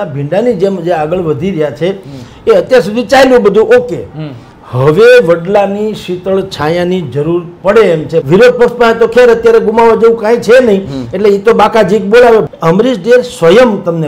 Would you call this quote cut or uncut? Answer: cut